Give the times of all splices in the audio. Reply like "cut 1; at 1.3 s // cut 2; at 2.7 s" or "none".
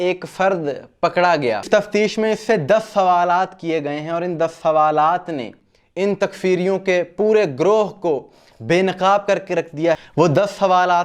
cut 1; at 1.7 s // cut 2; at 10.0 s